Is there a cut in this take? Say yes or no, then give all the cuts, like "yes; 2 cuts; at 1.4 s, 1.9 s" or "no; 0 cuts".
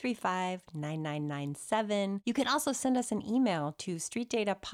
yes; 1 cut; at 2.2 s